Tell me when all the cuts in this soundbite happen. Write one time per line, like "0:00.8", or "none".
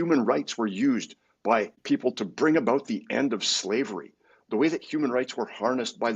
0:01.8